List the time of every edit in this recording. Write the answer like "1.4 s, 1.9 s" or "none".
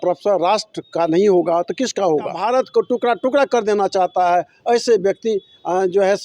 2.4 s